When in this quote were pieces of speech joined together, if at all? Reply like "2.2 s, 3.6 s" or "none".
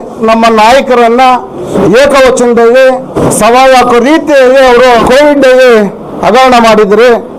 1.7 s, 3.1 s, 5.0 s